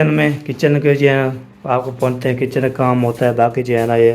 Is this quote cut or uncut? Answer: uncut